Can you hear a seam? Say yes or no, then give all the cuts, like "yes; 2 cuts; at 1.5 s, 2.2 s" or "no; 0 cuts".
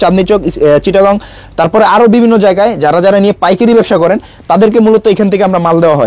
no; 0 cuts